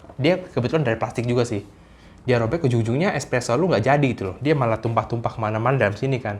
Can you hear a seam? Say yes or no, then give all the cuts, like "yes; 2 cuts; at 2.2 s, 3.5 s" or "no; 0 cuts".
no; 0 cuts